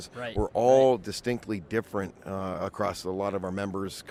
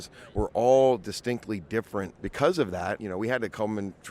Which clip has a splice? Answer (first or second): second